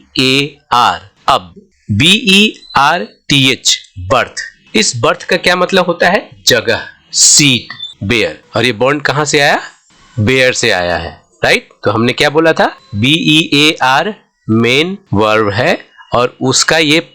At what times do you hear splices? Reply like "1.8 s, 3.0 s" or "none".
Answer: 1.1 s, 8.3 s